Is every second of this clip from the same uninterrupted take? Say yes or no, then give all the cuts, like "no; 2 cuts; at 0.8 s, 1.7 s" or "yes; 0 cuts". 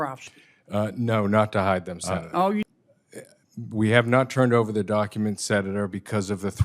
no; 1 cut; at 2.7 s